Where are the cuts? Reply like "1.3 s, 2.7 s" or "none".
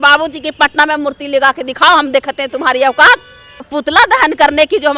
3.7 s